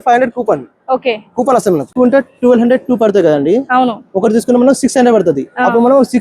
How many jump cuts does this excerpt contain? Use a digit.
1